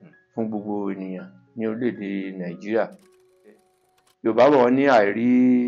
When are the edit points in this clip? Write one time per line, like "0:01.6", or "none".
0:03.7